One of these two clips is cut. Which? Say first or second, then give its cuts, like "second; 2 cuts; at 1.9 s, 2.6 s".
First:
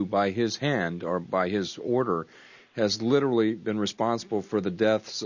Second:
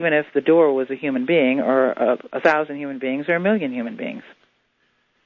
first; 1 cut; at 1.0 s